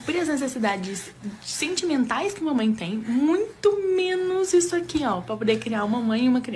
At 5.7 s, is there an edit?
yes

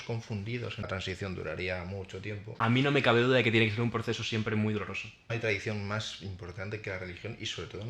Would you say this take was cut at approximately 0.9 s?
yes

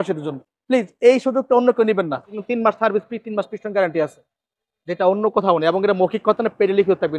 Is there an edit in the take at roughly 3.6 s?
no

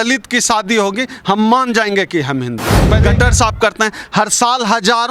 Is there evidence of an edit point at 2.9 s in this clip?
yes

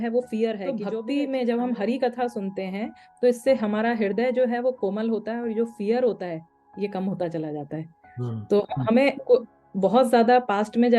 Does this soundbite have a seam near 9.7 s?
no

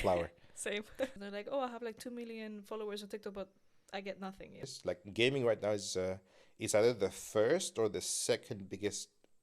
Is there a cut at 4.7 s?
yes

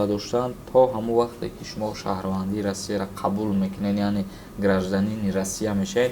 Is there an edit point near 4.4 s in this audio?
no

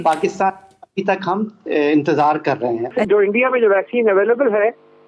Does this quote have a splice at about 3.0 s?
yes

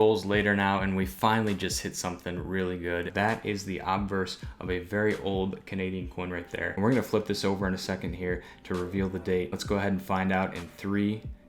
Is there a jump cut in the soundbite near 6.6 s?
yes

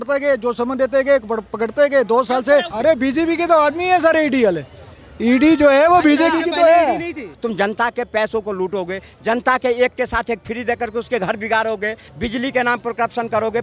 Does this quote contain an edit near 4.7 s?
no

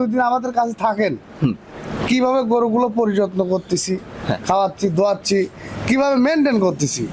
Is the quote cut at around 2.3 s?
no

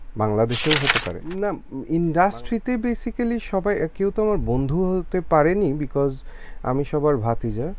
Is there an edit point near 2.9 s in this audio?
no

